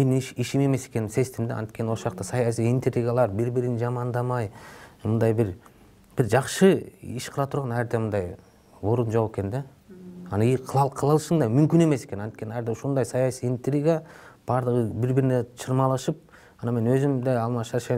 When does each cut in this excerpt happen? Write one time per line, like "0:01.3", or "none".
none